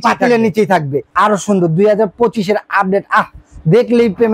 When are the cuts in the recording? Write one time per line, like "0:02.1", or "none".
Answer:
0:01.1